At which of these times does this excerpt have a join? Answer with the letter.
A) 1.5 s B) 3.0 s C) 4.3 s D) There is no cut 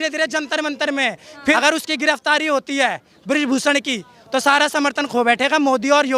A